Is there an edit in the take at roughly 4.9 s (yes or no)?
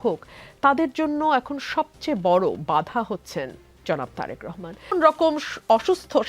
yes